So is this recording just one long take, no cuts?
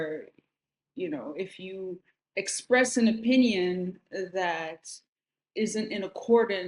no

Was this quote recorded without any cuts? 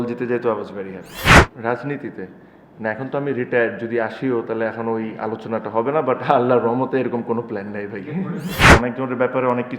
no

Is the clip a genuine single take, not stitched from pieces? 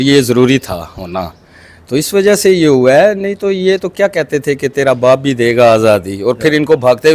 yes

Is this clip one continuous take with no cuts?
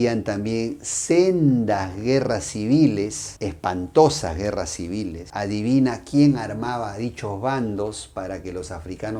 yes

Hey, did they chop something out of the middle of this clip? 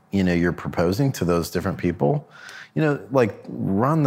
no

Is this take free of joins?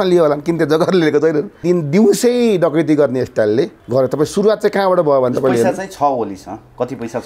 no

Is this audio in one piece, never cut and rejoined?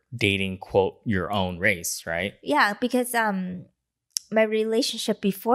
yes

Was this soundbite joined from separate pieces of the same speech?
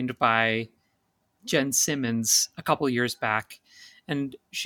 yes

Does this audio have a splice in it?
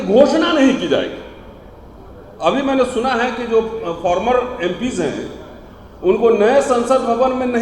no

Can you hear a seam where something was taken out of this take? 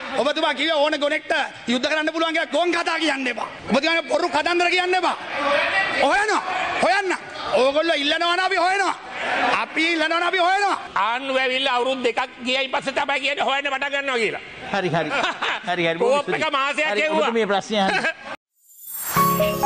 yes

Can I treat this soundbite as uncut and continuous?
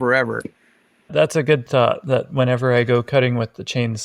no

